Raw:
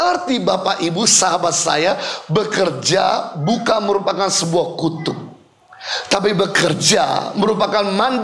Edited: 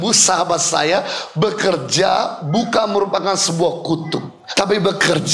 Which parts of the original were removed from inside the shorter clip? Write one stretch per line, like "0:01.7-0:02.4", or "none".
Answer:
0:05.3-0:05.9